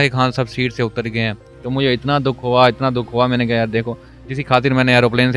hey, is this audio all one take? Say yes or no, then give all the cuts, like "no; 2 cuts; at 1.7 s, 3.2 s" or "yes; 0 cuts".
yes; 0 cuts